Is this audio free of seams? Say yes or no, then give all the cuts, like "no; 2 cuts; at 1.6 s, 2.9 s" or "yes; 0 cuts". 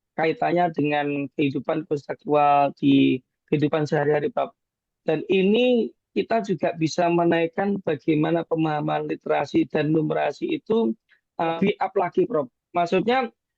no; 1 cut; at 11.6 s